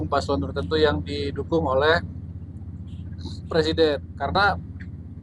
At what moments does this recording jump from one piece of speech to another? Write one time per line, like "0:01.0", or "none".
0:04.2

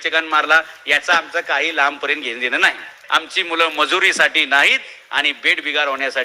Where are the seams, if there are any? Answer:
0:03.0

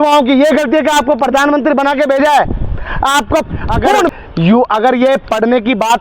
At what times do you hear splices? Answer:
0:04.1

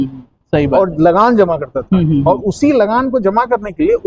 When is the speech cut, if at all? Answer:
none

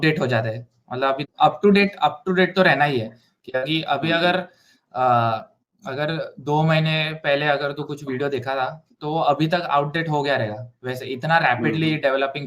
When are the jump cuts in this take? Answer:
0:01.2

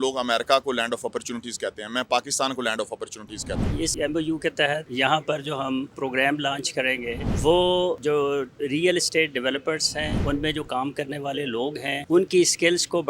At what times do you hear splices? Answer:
0:03.9
0:04.9
0:05.9
0:07.3
0:08.0
0:10.1
0:12.0

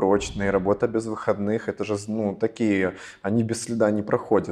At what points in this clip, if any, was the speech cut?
none

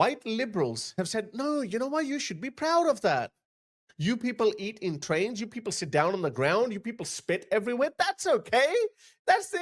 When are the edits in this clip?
none

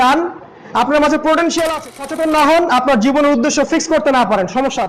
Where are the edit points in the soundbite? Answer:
0:02.0

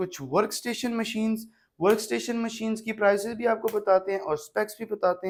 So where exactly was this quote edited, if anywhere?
none

